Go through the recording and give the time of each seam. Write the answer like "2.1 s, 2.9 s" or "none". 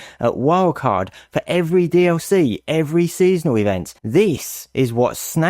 3.9 s